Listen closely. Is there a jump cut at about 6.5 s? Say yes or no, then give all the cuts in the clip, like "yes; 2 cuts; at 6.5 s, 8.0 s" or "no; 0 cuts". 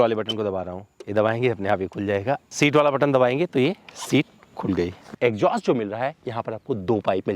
no; 2 cuts; at 2.4 s, 5.0 s